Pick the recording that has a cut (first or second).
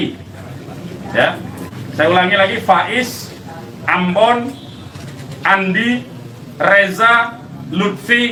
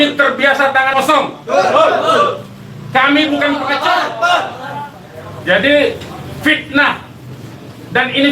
second